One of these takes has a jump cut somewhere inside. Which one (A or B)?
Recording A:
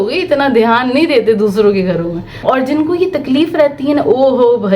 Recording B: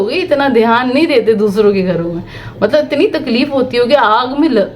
A